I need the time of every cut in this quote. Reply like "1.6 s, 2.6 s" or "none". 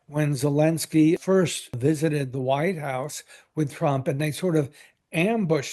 1.3 s